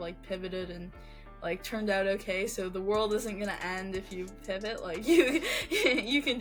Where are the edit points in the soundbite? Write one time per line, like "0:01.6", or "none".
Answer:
none